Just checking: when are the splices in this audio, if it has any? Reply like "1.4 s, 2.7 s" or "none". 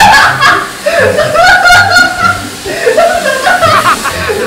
0.9 s